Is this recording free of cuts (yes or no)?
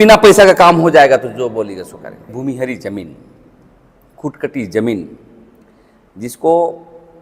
no